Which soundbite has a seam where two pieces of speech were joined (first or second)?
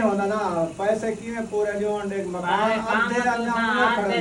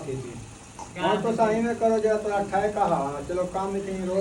second